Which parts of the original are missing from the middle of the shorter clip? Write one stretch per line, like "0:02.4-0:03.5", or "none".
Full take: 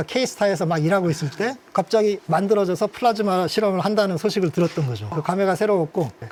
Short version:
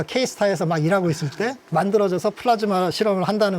0:01.6-0:02.2